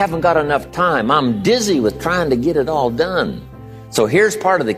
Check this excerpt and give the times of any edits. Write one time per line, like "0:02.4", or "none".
none